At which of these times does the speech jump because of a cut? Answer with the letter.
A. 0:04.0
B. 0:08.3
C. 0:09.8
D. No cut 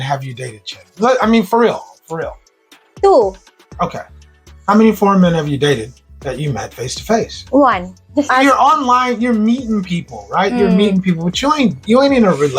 B